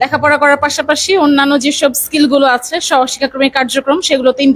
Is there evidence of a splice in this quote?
no; 0 cuts

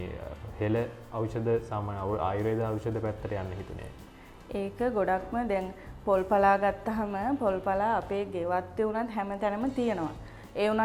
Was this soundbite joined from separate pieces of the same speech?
no; 0 cuts

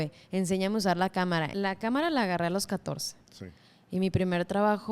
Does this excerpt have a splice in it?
yes; 1 cut; at 1.5 s

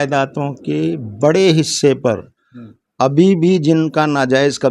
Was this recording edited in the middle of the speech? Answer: no; 0 cuts

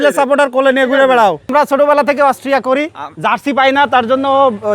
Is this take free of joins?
no; 1 cut; at 1.5 s

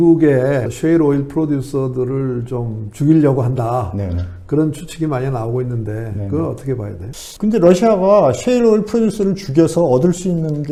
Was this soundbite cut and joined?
no; 0 cuts

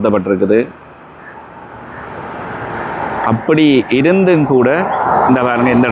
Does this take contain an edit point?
no; 0 cuts

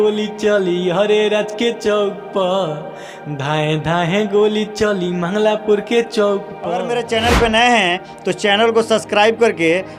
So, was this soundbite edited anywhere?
yes; 1 cut; at 6.8 s

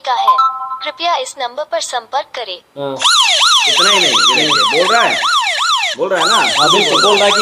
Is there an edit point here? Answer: no; 0 cuts

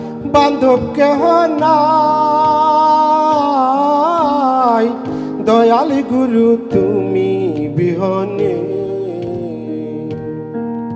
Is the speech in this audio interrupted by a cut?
no; 0 cuts

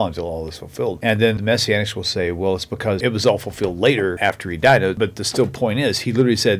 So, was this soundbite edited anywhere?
yes; 3 cuts; at 1.2 s, 4.2 s, 4.9 s

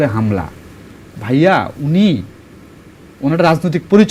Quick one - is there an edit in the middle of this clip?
no; 0 cuts

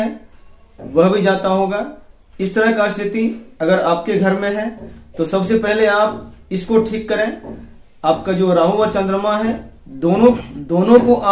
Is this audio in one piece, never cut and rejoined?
yes; 0 cuts

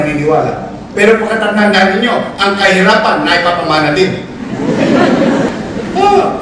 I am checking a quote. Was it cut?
yes; 1 cut; at 5.5 s

